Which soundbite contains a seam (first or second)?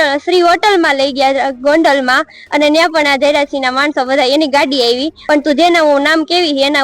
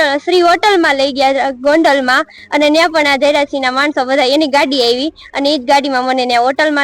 first